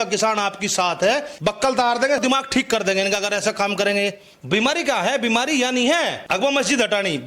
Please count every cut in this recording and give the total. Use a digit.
3